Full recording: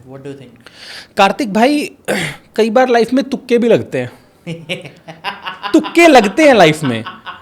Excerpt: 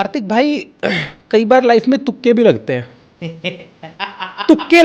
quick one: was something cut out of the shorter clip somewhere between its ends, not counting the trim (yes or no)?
no